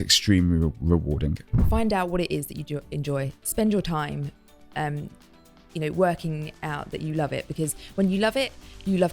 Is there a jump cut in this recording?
yes; 1 cut; at 1.5 s

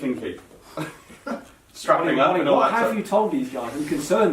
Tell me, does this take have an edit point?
no; 0 cuts

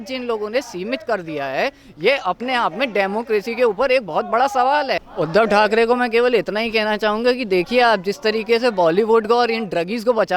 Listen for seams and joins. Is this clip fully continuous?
no; 1 cut; at 5.1 s

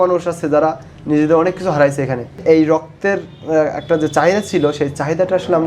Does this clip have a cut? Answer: yes; 1 cut; at 2.4 s

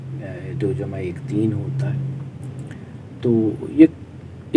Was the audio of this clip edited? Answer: no; 0 cuts

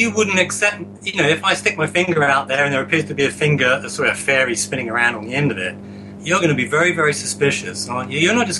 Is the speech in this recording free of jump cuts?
yes; 0 cuts

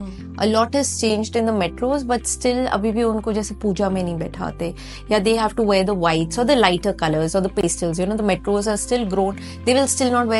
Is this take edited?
no; 0 cuts

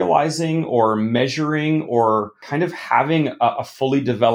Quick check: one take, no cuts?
no; 1 cut; at 2.4 s

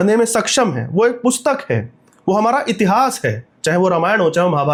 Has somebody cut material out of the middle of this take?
no; 0 cuts

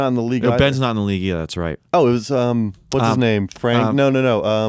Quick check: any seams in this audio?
yes; 2 cuts; at 1.8 s, 2.8 s

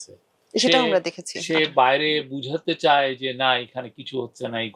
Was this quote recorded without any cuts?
yes; 0 cuts

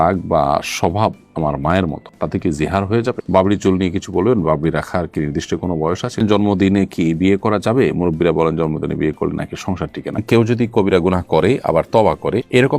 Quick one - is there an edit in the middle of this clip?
yes; 3 cuts; at 3.2 s, 6.2 s, 10.2 s

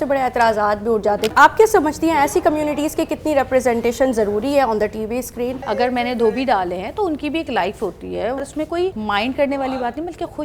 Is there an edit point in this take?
yes; 3 cuts; at 1.3 s, 5.6 s, 8.4 s

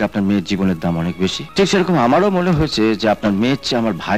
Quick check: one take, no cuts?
no; 1 cut; at 1.4 s

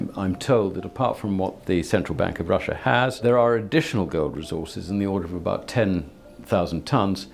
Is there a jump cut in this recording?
yes; 1 cut; at 3.2 s

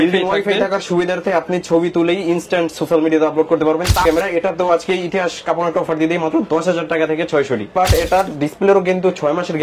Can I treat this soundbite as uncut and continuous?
no; 2 cuts; at 4.0 s, 7.7 s

